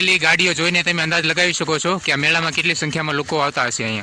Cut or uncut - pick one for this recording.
uncut